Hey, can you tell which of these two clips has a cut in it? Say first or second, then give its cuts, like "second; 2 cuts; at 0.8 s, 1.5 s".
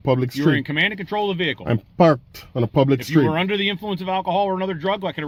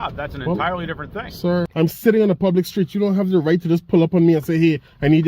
second; 1 cut; at 1.7 s